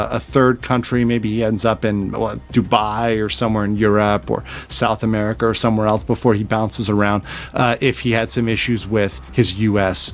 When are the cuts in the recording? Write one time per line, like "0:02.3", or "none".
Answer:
none

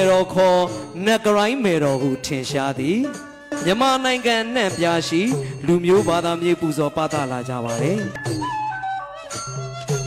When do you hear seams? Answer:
none

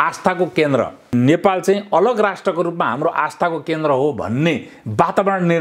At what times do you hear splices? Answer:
0:01.1

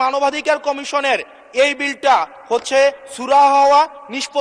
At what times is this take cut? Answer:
none

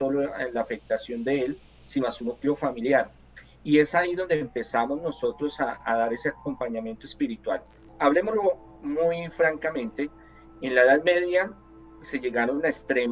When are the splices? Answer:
0:07.9

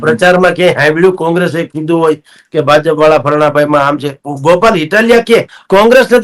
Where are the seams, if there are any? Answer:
none

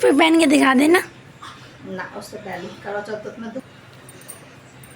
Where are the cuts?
0:03.6

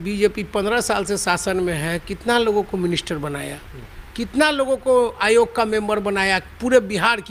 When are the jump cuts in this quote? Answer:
none

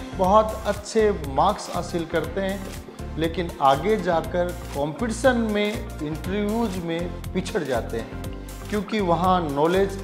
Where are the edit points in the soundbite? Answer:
none

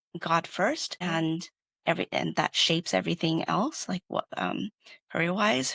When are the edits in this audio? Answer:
0:01.0

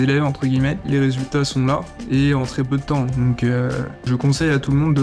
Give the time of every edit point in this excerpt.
0:00.8
0:04.1

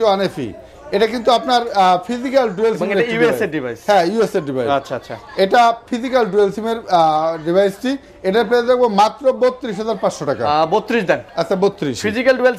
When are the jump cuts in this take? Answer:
none

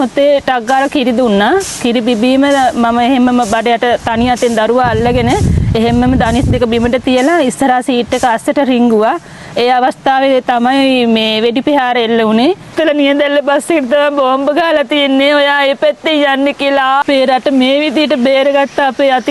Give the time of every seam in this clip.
0:12.7
0:17.0

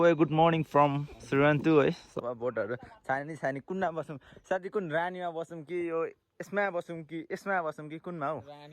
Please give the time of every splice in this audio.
0:02.2

